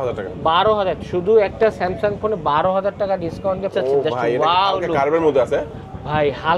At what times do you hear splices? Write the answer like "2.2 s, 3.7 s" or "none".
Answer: 3.7 s

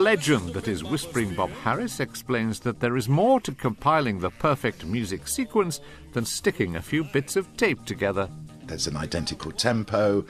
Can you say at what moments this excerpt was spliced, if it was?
none

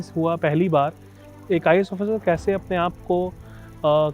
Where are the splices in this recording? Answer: 1.3 s

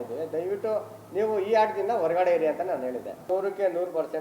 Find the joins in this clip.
3.2 s

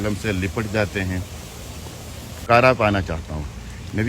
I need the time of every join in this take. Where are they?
2.4 s

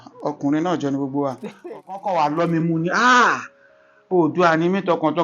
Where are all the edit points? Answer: 1.7 s

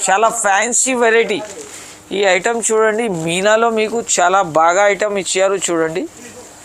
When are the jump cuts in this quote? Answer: none

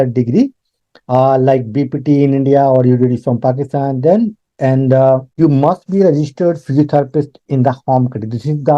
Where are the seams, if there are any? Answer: 5.3 s

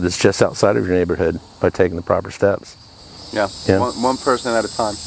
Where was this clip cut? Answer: none

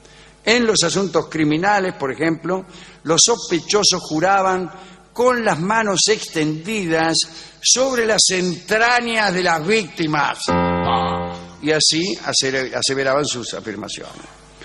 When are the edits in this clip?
5.3 s

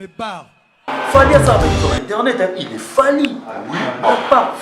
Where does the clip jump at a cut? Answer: 0.9 s

